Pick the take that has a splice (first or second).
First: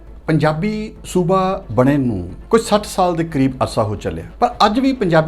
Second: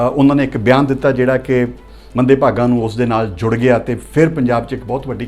first